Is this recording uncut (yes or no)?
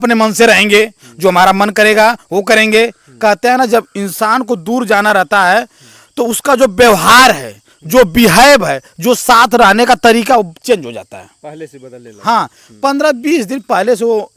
yes